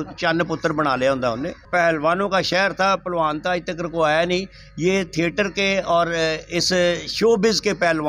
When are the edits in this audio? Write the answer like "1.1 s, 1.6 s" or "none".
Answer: 1.6 s

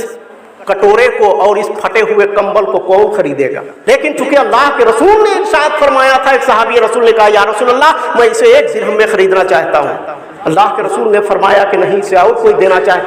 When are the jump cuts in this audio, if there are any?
3.7 s

